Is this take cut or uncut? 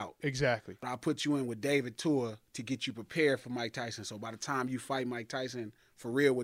cut